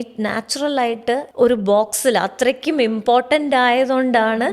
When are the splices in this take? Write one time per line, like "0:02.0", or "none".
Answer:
0:01.3